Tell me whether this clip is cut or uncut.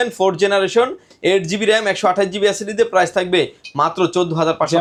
uncut